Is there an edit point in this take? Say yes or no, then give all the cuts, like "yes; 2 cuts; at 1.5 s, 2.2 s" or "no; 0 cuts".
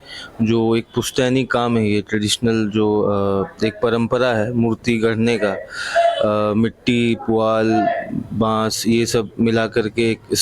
no; 0 cuts